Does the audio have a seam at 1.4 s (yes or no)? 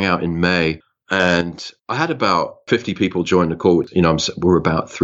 no